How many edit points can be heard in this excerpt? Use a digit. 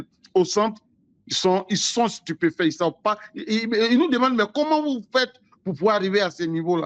0